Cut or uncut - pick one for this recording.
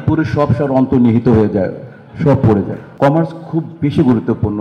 cut